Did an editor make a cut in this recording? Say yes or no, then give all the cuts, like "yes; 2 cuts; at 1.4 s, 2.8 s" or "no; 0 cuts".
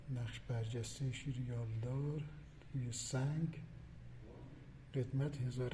no; 0 cuts